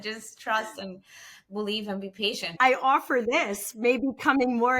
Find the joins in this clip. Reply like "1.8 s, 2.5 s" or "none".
2.5 s